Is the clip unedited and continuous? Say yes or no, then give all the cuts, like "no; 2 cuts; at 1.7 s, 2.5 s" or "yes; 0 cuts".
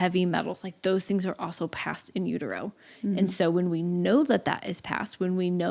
yes; 0 cuts